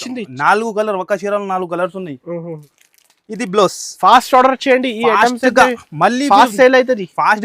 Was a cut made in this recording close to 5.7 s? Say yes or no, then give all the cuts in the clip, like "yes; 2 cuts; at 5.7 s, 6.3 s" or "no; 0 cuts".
no; 1 cut; at 2.7 s